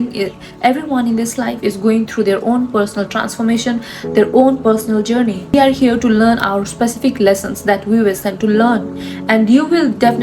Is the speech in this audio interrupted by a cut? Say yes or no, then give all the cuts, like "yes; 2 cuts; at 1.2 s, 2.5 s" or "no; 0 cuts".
yes; 1 cut; at 5.5 s